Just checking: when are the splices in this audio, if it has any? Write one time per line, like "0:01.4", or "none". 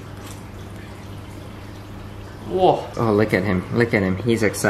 0:02.9

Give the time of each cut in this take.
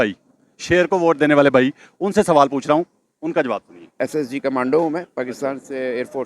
0:04.0

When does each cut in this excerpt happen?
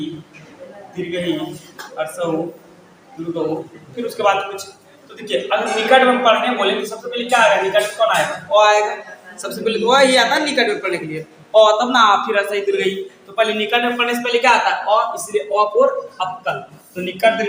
none

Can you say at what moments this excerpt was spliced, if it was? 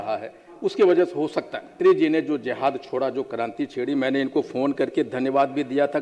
0:01.8

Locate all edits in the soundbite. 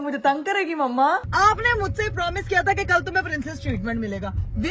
0:01.2

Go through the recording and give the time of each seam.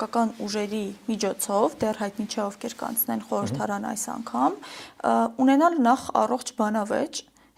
none

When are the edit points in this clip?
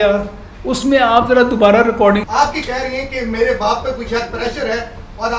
0:02.2

